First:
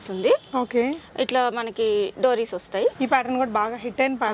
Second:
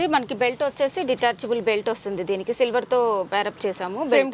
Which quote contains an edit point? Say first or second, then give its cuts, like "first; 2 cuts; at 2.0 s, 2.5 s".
first; 1 cut; at 3.0 s